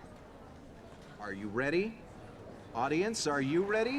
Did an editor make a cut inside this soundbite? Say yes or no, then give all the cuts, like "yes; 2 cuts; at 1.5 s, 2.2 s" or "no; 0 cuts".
yes; 1 cut; at 1.1 s